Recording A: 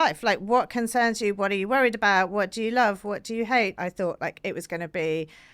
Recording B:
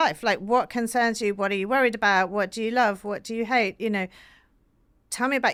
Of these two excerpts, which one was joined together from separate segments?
A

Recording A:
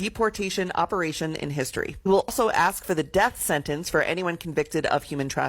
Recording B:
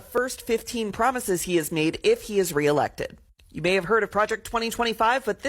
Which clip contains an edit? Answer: A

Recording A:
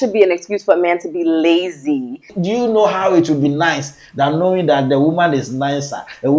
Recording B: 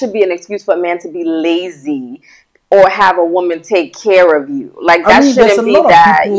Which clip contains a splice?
A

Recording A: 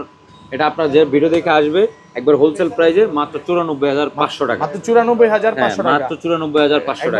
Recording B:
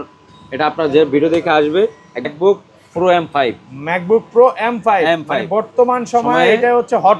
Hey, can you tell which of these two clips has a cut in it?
B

